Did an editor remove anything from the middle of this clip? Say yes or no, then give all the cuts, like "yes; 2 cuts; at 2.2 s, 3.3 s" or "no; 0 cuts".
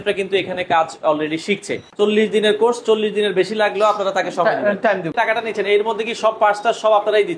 yes; 2 cuts; at 1.8 s, 5.1 s